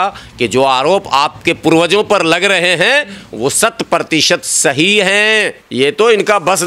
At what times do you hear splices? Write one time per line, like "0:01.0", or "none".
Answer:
0:05.6